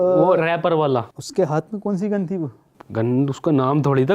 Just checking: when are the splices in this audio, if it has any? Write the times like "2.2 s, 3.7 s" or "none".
1.1 s